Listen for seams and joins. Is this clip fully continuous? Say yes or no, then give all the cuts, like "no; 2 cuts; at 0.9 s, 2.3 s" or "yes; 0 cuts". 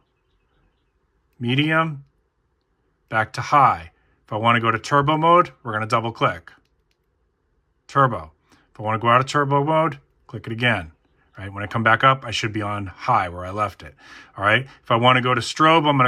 yes; 0 cuts